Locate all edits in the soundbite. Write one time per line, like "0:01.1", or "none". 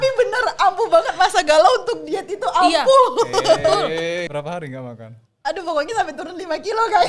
0:04.3